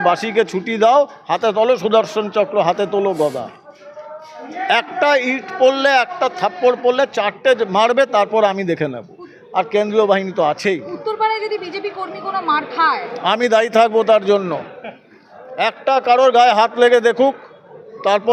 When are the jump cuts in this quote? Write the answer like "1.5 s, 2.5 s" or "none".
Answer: none